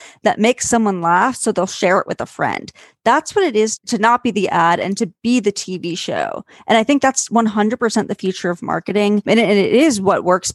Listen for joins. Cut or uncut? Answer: uncut